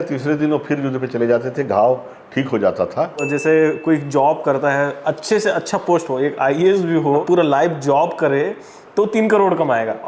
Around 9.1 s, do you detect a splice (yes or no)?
no